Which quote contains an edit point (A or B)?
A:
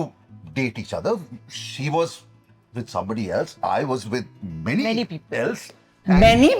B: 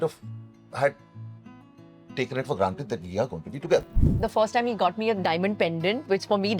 B